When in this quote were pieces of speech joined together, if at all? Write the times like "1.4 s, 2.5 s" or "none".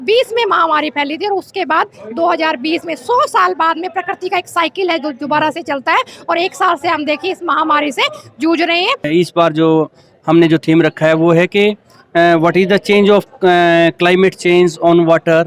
9.1 s